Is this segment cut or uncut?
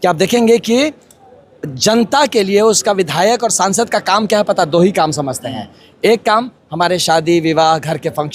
uncut